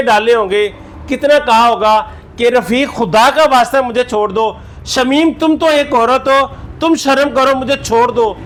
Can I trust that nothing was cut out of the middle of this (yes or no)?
yes